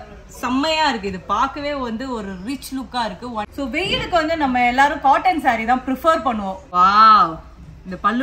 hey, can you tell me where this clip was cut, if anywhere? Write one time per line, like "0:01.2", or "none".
0:03.4
0:06.6